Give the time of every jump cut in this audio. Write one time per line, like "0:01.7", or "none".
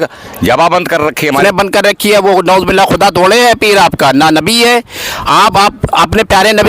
0:01.4